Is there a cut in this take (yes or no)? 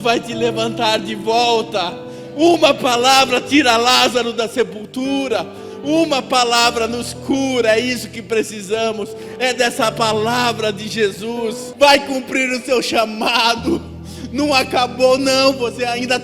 yes